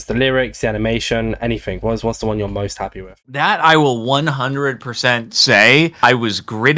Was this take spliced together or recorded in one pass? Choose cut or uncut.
cut